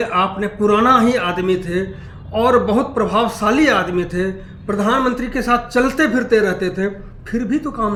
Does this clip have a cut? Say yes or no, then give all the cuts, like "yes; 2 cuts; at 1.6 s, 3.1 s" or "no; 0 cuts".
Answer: no; 0 cuts